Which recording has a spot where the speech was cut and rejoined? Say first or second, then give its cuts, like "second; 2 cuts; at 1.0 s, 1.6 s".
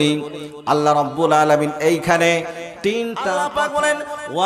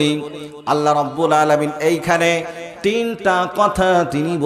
first; 1 cut; at 3.4 s